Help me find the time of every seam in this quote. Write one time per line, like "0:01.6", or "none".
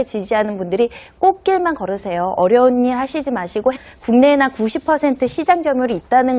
none